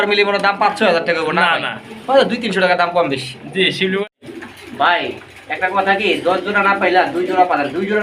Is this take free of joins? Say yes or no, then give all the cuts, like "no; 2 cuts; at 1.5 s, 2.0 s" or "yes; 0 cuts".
no; 1 cut; at 4.1 s